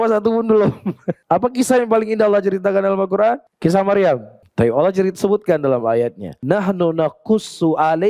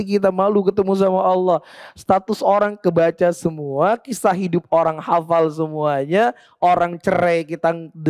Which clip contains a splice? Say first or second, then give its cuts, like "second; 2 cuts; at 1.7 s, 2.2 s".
first; 4 cuts; at 1.1 s, 3.5 s, 4.4 s, 6.3 s